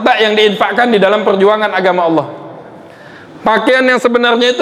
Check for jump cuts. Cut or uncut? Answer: uncut